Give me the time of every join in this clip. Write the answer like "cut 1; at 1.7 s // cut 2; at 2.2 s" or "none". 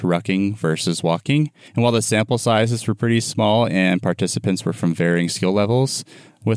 none